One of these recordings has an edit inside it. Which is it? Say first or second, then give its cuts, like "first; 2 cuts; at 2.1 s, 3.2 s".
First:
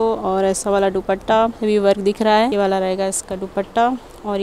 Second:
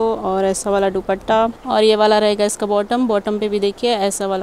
first; 2 cuts; at 1.6 s, 2.5 s